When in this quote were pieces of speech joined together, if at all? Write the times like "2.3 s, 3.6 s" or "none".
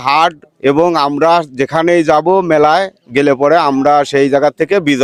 none